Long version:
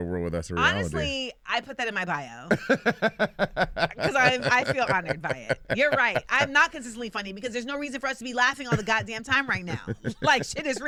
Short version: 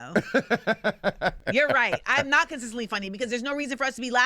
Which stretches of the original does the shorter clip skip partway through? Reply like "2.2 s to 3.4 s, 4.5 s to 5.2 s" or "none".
3.7 s to 5.6 s